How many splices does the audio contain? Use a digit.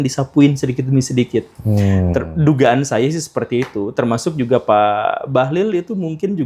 0